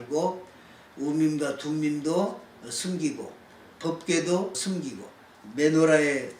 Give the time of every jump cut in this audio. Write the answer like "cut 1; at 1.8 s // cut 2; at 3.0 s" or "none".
cut 1; at 3.7 s // cut 2; at 4.8 s